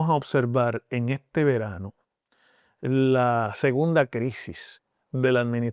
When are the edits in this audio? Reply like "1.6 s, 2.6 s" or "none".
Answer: none